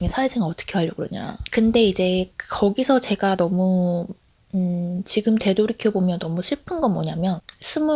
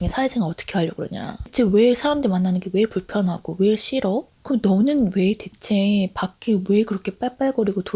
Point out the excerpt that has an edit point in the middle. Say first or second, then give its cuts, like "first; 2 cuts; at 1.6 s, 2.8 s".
second; 2 cuts; at 1.4 s, 4.3 s